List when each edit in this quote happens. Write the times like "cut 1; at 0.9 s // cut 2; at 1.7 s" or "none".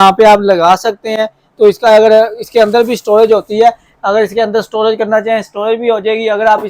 none